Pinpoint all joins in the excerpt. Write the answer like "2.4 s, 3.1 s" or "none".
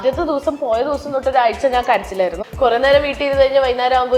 2.4 s